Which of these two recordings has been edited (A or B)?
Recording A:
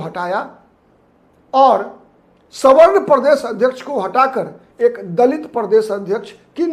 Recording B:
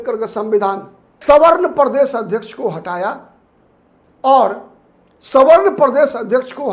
B